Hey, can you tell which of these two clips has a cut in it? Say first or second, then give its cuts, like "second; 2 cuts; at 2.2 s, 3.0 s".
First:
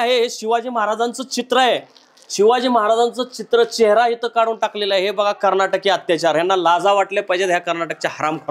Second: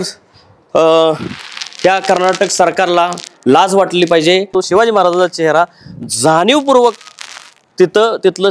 second; 1 cut; at 4.5 s